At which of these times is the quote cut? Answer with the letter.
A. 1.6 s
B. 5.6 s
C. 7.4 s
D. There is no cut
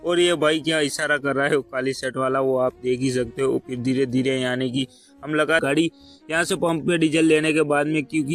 B